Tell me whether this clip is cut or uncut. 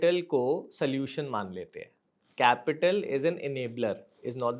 uncut